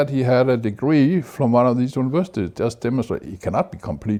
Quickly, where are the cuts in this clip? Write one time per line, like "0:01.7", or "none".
none

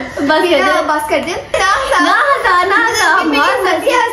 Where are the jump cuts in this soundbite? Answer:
0:01.5

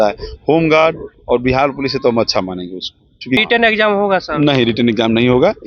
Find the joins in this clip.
0:03.4

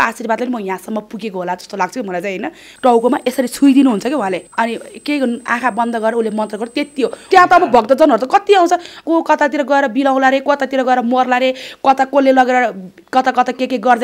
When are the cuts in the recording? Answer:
0:02.7
0:04.5
0:07.2
0:09.0

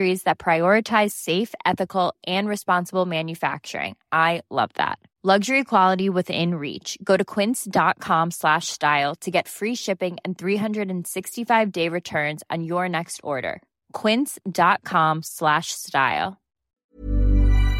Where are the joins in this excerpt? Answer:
0:16.8

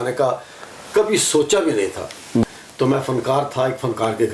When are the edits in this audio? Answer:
0:02.4

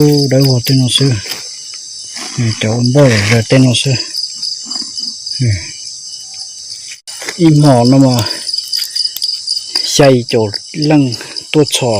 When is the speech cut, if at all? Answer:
0:07.0

